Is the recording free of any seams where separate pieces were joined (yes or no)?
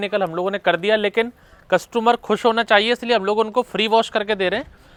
yes